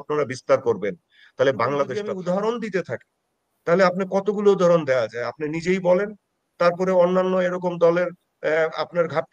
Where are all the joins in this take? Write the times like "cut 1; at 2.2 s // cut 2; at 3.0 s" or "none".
cut 1; at 2.1 s